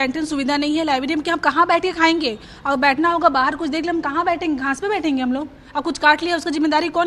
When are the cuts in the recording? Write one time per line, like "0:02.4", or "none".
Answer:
none